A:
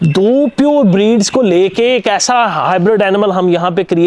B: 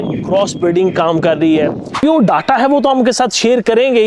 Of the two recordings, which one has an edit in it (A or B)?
B